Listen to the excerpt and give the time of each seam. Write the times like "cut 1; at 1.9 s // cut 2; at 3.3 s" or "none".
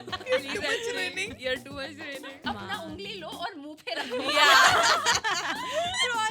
cut 1; at 2.4 s